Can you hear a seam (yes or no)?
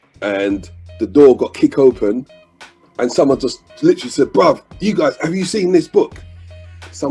no